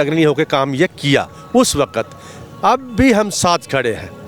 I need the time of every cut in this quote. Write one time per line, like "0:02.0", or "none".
none